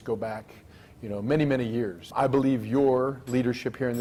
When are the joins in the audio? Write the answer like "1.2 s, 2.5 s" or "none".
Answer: none